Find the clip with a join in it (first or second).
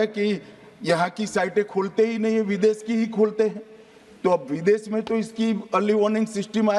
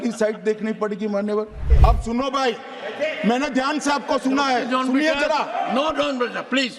second